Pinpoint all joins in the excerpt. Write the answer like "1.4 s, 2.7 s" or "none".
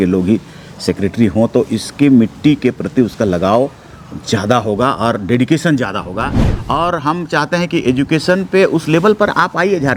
none

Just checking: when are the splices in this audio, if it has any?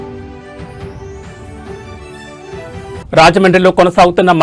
1.5 s, 2.8 s

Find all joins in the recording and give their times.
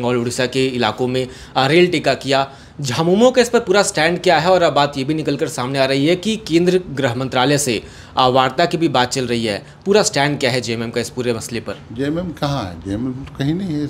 none

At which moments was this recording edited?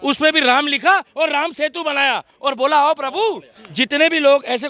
none

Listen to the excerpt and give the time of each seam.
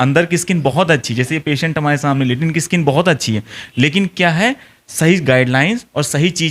none

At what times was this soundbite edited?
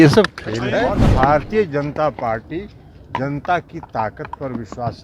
1.0 s

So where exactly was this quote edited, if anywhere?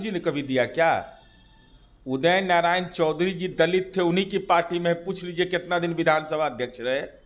none

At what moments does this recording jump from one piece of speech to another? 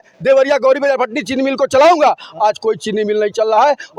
none

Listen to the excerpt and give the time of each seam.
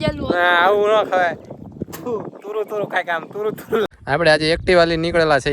3.9 s

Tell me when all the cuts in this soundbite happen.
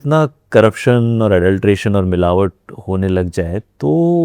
none

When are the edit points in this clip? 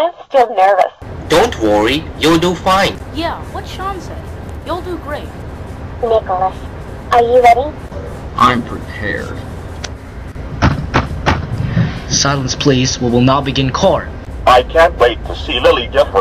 none

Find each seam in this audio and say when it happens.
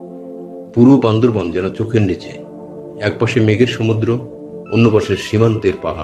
none

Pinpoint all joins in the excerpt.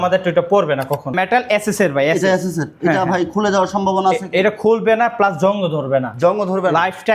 1.1 s

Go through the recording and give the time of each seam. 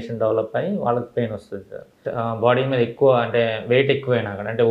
2.0 s

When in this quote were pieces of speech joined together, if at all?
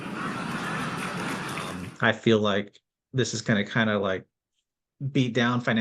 1.8 s

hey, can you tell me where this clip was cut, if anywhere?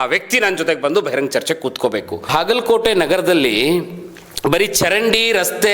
2.3 s

